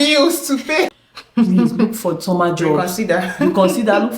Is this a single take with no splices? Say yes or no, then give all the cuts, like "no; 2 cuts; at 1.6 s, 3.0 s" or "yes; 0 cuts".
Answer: no; 1 cut; at 0.9 s